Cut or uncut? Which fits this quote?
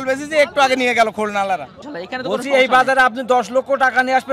cut